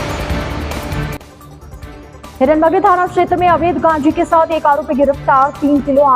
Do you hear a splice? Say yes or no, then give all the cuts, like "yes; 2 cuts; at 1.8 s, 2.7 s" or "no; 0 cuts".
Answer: no; 0 cuts